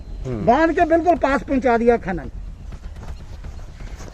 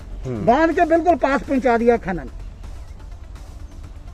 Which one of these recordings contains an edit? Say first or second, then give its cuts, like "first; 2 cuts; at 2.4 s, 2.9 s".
first; 1 cut; at 2.6 s